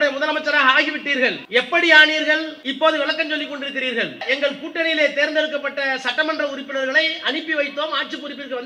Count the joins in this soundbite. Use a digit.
3